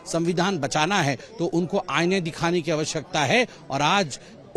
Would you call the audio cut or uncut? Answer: uncut